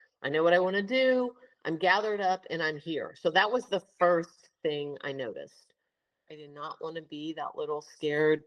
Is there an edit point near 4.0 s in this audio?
no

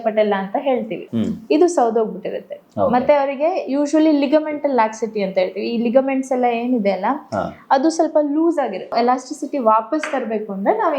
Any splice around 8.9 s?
yes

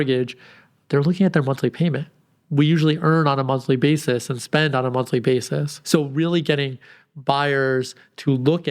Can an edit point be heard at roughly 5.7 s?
yes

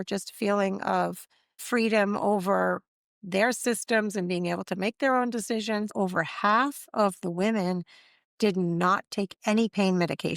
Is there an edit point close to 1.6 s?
yes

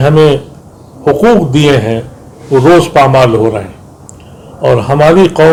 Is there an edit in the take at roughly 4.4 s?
no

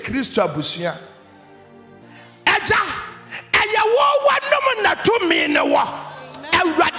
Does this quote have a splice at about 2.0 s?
yes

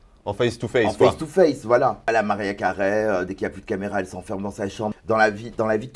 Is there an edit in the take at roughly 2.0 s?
yes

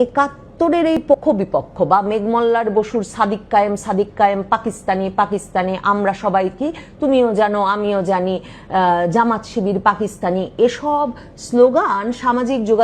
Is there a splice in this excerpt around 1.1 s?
yes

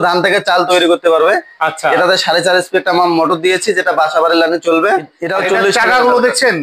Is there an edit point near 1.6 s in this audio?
no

